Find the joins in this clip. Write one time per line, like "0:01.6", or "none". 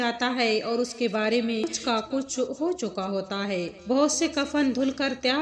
0:01.7